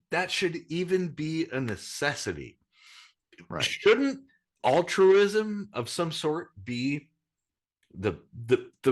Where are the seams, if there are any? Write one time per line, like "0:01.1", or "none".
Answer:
none